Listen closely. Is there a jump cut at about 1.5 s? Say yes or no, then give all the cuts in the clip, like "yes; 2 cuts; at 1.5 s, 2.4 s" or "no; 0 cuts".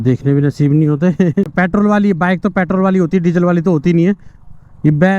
yes; 1 cut; at 1.5 s